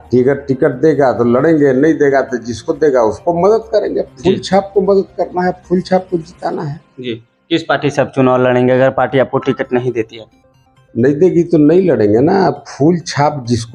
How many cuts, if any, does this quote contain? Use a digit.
0